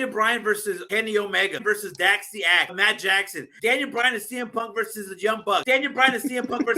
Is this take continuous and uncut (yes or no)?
no